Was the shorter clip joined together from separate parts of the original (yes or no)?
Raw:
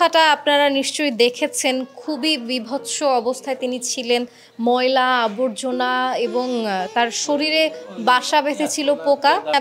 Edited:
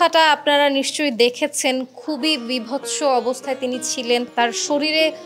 yes